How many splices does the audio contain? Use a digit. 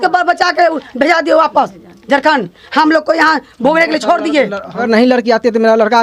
1